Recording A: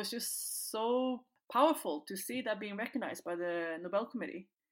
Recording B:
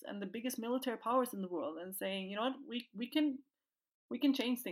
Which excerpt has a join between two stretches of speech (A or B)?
A